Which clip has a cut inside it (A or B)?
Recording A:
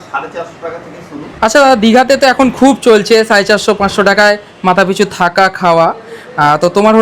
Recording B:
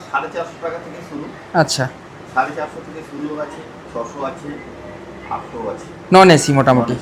A